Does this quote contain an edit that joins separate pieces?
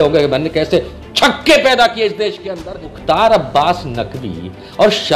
yes; 1 cut; at 2.9 s

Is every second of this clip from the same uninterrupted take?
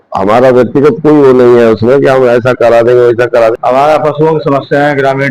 no; 1 cut; at 3.5 s

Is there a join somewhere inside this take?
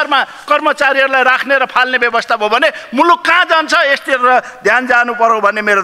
no; 0 cuts

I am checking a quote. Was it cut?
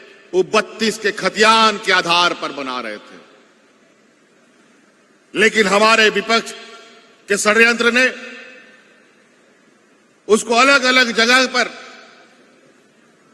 no; 0 cuts

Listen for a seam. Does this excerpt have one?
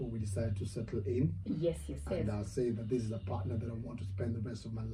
no; 0 cuts

